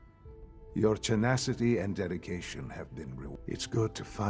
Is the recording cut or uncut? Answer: cut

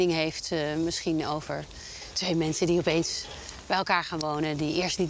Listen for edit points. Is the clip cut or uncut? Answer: uncut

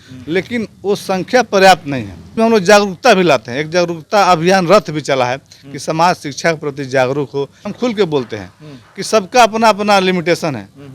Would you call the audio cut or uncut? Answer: cut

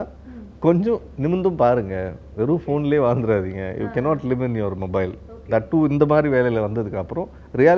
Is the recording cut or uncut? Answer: uncut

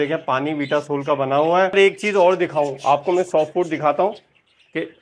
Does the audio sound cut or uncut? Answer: cut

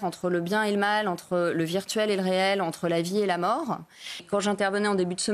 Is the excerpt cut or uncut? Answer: cut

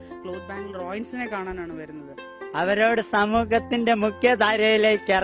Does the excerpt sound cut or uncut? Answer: cut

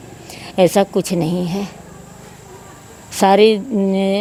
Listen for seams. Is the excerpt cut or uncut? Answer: uncut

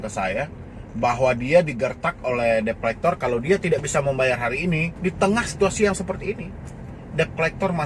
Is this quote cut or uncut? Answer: cut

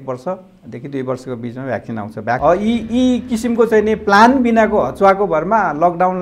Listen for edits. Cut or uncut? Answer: cut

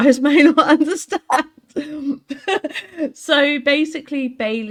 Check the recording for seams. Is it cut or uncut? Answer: uncut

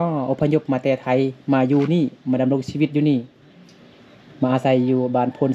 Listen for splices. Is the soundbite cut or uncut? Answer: uncut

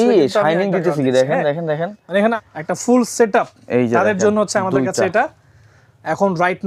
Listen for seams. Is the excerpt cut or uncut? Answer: cut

